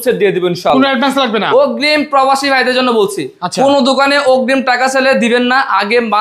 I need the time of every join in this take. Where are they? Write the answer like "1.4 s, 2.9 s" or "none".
none